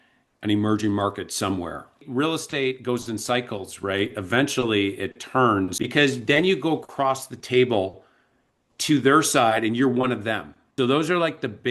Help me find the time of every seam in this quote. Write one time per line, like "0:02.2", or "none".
0:02.0
0:05.8
0:10.6